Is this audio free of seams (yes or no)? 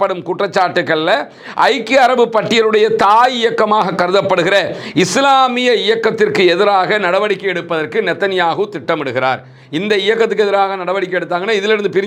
yes